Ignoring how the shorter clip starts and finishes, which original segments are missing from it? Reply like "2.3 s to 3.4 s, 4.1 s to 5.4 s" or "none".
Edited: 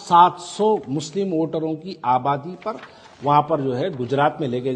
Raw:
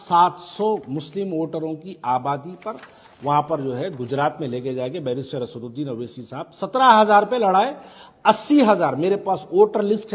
none

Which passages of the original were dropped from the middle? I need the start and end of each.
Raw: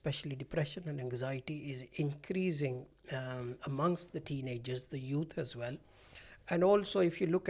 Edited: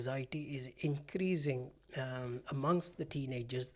none

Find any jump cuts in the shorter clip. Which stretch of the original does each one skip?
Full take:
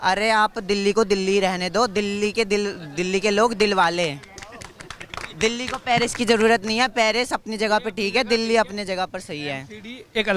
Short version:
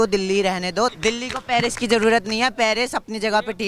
1.9 s to 5.3 s

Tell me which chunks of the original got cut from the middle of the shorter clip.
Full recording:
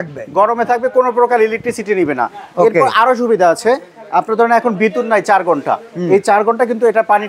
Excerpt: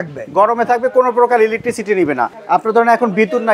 2.3 s to 4.0 s

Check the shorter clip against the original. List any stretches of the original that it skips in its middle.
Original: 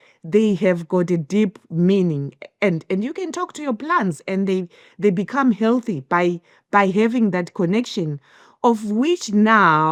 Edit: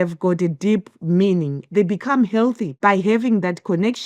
2.3 s to 4.9 s, 5.9 s to 6.6 s

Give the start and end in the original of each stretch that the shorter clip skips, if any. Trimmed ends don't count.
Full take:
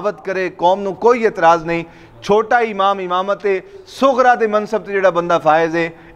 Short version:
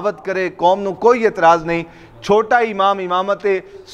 none

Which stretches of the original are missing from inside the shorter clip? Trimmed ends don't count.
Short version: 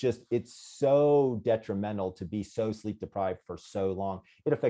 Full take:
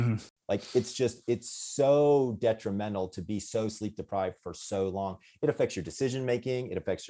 none

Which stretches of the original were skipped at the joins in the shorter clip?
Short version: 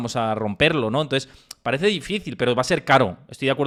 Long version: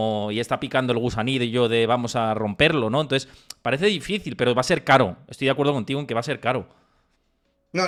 none

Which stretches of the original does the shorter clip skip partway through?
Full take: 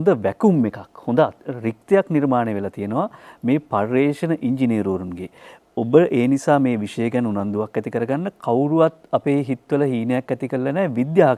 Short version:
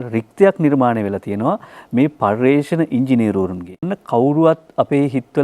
5.5 s to 8.3 s

